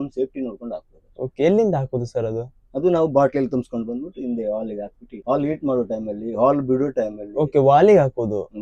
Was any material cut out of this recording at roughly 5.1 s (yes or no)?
yes